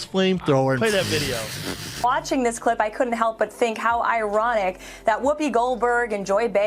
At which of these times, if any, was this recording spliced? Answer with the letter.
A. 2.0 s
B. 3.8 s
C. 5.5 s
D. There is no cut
A